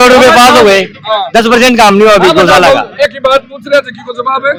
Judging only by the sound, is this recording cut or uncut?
uncut